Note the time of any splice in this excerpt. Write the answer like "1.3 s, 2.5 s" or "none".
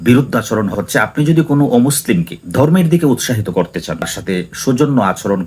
0.7 s, 4.1 s

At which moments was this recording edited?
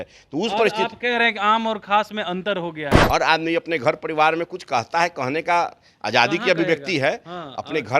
2.9 s

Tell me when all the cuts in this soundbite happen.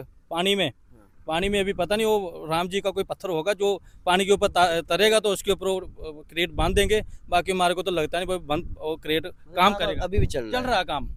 none

